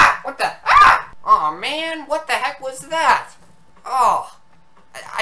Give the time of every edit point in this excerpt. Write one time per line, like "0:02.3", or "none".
0:01.1